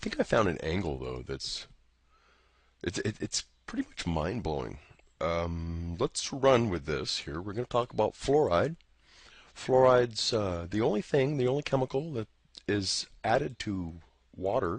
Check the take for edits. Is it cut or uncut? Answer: cut